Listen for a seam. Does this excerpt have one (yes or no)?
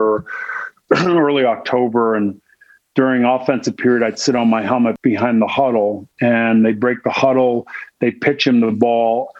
yes